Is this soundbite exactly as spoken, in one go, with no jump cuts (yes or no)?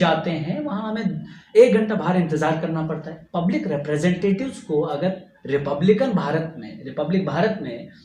yes